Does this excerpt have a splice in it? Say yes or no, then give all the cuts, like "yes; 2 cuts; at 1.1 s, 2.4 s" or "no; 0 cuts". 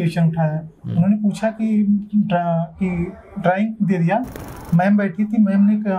no; 0 cuts